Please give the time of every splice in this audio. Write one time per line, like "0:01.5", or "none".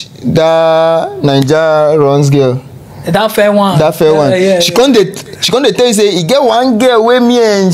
none